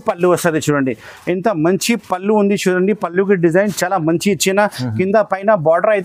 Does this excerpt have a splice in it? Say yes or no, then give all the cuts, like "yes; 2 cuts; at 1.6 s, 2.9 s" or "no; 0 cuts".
no; 0 cuts